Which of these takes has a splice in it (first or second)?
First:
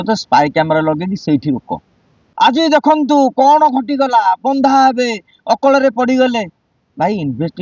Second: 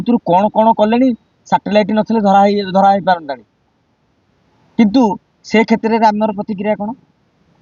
first